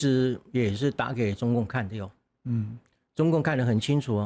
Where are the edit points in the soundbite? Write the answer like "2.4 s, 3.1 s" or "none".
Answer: none